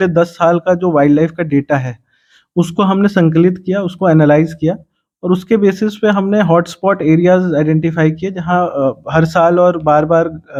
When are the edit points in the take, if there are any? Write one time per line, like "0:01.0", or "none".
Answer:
none